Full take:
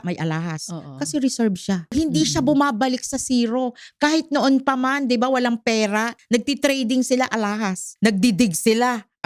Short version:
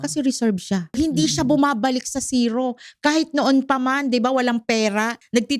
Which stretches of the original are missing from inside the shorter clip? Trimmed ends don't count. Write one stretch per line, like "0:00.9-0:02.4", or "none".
none